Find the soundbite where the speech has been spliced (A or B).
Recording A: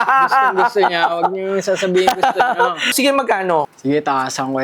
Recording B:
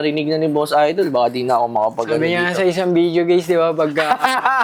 A